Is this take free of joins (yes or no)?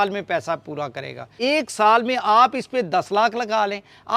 no